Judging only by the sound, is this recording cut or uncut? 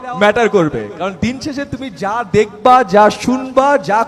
uncut